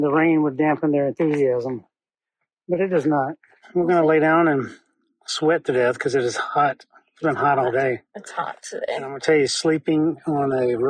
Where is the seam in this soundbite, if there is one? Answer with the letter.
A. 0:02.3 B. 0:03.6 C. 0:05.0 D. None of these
B